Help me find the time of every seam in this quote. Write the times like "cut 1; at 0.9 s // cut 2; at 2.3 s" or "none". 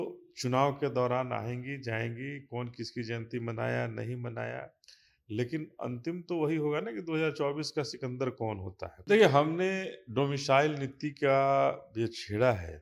cut 1; at 8.9 s